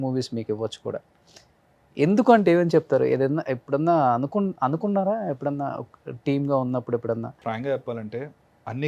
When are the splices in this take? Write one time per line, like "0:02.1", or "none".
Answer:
0:07.4